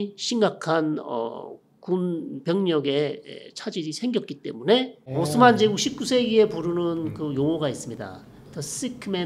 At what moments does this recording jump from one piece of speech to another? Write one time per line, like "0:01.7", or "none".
0:05.1